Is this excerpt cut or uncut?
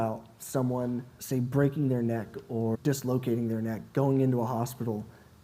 cut